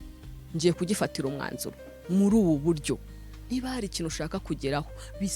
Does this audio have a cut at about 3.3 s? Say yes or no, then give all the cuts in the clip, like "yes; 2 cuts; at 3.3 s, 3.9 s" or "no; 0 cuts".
yes; 1 cut; at 3.3 s